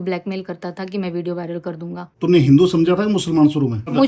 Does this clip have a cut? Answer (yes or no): no